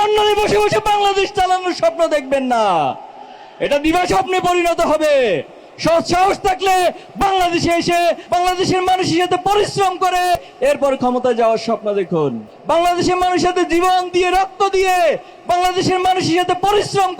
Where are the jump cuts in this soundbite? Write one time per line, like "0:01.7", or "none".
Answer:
0:08.2
0:10.4
0:12.5